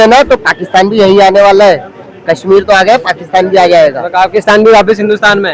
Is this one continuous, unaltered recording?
yes; 0 cuts

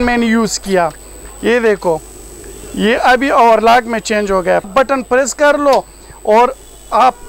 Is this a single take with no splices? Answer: no; 1 cut; at 4.7 s

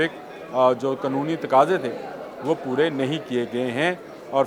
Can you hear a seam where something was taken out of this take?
no; 0 cuts

